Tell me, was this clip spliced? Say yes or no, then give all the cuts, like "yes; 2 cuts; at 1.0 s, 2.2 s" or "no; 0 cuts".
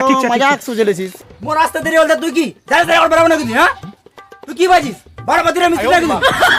yes; 1 cut; at 1.2 s